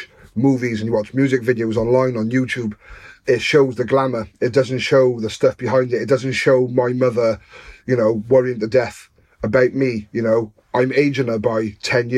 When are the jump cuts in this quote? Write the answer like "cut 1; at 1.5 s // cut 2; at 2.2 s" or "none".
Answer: cut 1; at 3.2 s